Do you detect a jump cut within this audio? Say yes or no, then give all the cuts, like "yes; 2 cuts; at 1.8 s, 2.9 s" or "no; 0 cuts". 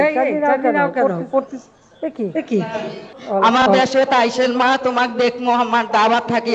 yes; 1 cut; at 3.1 s